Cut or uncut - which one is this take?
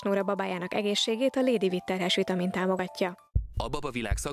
cut